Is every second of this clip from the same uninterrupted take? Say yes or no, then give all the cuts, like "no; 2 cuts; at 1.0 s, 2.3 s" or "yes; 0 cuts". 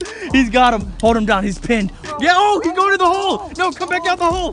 no; 1 cut; at 2.0 s